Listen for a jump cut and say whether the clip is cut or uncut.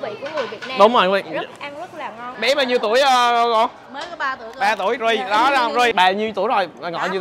cut